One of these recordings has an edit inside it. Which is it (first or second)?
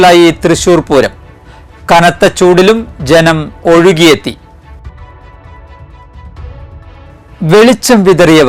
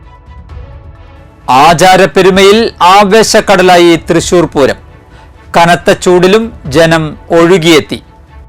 second